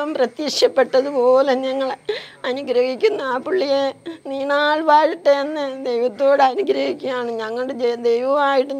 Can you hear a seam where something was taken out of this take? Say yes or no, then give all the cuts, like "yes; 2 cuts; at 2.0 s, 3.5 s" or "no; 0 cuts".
no; 0 cuts